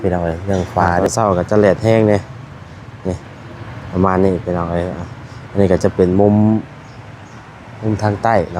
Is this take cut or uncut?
cut